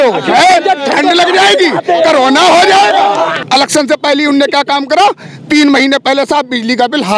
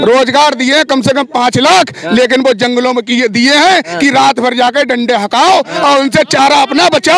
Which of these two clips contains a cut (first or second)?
first